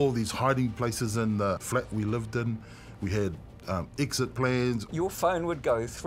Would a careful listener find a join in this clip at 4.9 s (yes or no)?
yes